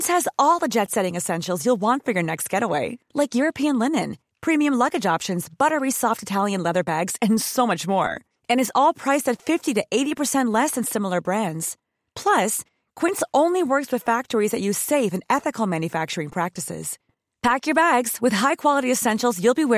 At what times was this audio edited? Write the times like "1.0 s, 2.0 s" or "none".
none